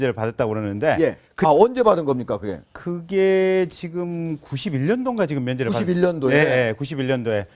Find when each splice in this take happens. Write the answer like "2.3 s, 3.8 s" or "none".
2.0 s